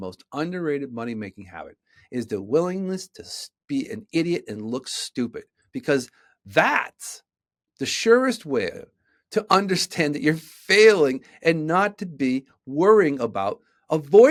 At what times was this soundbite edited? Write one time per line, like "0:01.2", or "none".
none